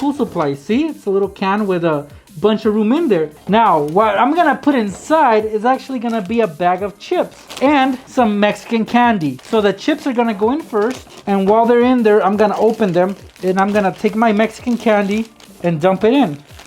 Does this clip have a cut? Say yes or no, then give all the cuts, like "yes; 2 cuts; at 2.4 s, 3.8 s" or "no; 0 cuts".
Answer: yes; 5 cuts; at 3.4 s, 8.0 s, 9.4 s, 11.1 s, 13.3 s